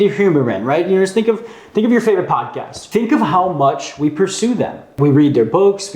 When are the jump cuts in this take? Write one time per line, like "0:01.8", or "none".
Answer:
0:02.8
0:04.9